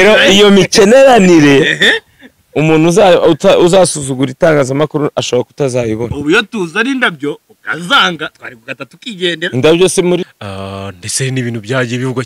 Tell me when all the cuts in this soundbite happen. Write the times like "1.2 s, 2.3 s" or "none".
10.3 s